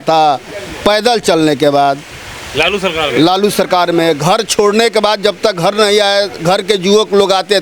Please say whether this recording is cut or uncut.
uncut